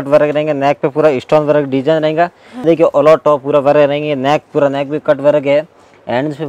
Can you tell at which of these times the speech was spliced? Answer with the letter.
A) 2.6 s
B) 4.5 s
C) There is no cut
A